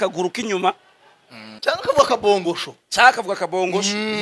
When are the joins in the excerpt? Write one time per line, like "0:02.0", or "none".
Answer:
0:01.6

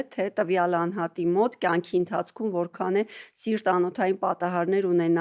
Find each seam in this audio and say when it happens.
none

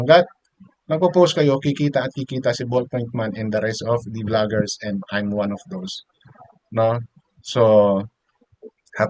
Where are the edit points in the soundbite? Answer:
none

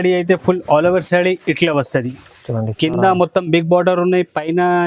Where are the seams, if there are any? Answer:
none

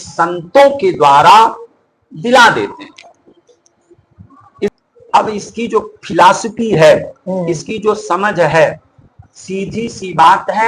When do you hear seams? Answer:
0:04.7

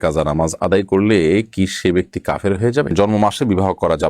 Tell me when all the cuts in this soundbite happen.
0:02.9

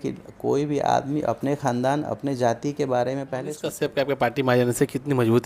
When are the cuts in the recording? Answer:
0:03.6

